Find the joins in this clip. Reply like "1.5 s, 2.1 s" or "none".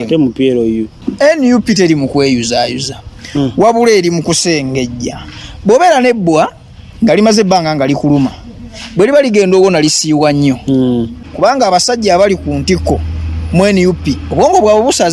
0.9 s, 11.2 s